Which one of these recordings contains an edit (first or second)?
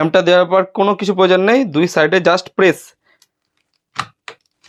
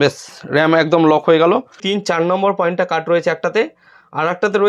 second